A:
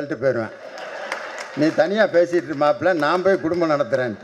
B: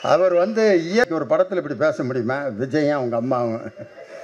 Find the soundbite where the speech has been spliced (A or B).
B